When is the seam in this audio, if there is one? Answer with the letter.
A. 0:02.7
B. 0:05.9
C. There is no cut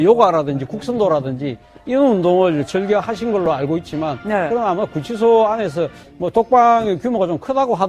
A